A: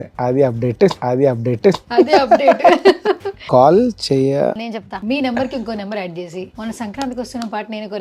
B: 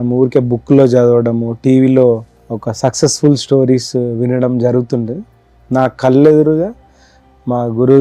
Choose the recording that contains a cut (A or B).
A